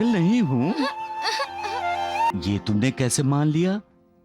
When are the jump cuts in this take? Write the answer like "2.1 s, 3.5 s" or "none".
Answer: 2.3 s